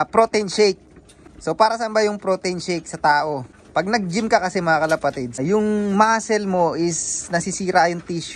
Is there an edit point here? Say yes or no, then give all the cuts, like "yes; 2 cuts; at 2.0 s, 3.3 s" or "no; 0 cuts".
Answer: yes; 2 cuts; at 3.5 s, 5.4 s